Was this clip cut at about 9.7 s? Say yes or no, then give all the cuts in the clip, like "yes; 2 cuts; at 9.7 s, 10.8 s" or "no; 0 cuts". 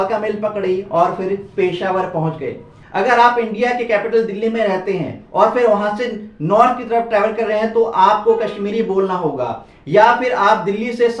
no; 1 cut; at 2.8 s